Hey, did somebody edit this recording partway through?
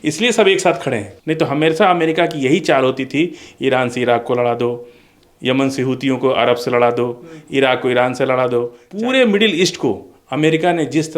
yes; 2 cuts; at 1.1 s, 8.8 s

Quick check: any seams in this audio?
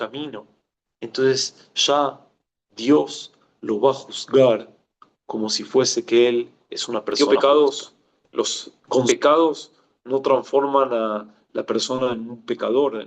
yes; 1 cut; at 7.2 s

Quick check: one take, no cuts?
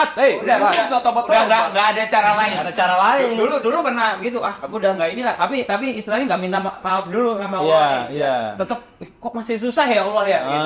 yes; 0 cuts

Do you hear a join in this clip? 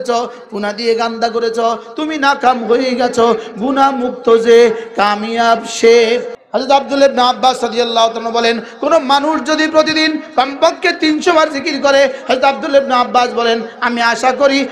yes; 1 cut; at 6.4 s

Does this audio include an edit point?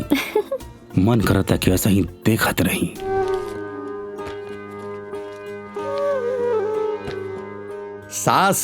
yes; 1 cut; at 3.0 s

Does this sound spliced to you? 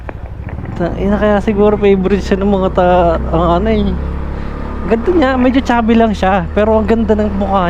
no; 0 cuts

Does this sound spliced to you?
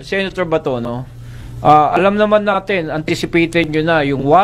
no; 0 cuts

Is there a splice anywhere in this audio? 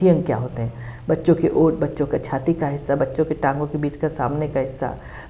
no; 0 cuts

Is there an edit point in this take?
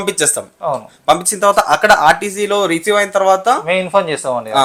no; 0 cuts

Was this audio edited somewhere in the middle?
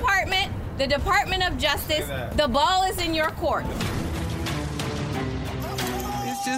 yes; 1 cut; at 3.8 s

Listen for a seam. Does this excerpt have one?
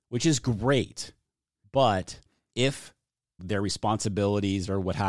no; 0 cuts

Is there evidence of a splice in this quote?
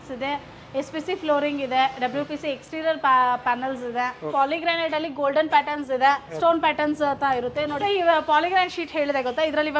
yes; 3 cuts; at 4.3 s, 6.3 s, 7.8 s

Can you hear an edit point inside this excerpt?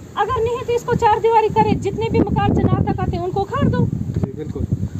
no; 0 cuts

